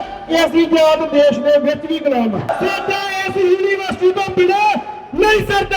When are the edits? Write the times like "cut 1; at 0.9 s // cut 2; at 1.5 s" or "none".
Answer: cut 1; at 2.5 s